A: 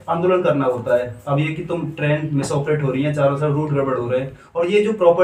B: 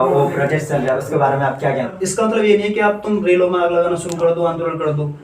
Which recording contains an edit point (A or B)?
B